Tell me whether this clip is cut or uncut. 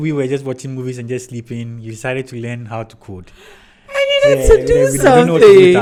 uncut